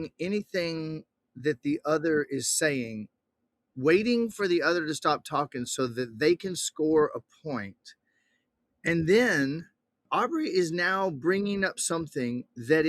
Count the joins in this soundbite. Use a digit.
1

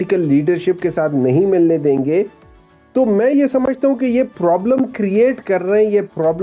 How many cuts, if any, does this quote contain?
0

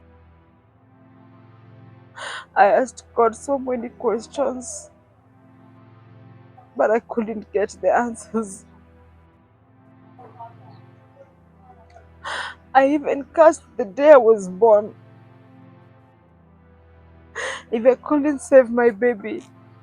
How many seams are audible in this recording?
0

